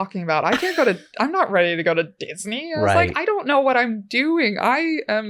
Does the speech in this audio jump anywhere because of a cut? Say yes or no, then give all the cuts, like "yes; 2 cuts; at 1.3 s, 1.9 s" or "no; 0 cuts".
no; 0 cuts